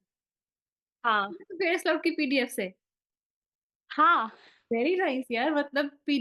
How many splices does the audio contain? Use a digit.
0